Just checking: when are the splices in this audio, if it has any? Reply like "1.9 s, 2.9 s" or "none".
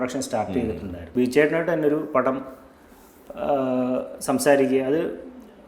1.0 s